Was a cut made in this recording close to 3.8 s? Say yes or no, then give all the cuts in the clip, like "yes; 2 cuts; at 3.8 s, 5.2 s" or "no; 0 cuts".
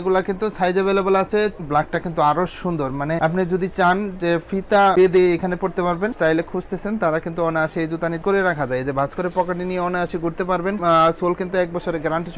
no; 3 cuts; at 1.6 s, 6.1 s, 8.2 s